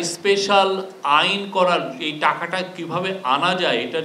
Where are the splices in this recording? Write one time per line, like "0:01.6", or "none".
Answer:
none